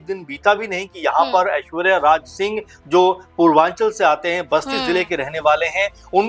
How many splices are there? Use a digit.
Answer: 0